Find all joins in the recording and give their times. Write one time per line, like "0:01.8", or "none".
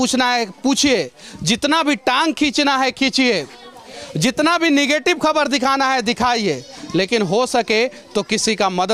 none